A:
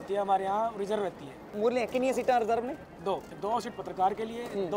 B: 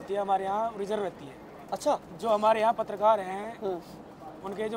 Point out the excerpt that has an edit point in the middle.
A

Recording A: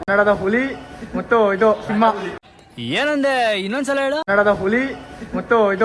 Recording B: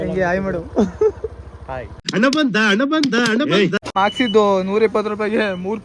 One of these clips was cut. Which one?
B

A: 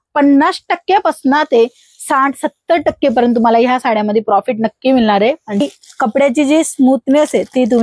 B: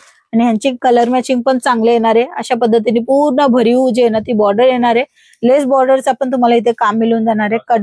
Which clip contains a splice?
A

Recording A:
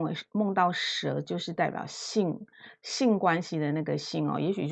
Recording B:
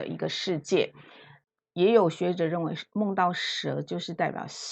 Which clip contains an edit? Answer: B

